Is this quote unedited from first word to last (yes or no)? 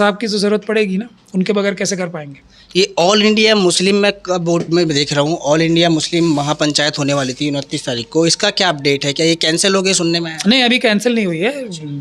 yes